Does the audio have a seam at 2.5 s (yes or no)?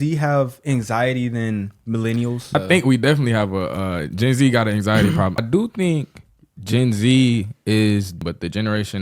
yes